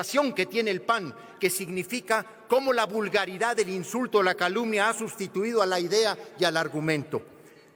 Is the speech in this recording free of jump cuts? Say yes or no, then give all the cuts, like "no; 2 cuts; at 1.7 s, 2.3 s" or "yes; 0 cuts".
yes; 0 cuts